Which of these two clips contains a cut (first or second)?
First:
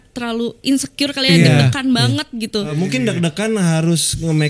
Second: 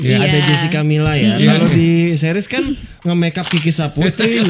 first